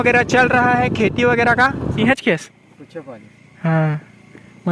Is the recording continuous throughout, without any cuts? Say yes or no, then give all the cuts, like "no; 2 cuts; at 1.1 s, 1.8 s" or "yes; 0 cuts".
no; 1 cut; at 2.0 s